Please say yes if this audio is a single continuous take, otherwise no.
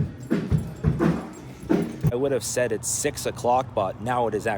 no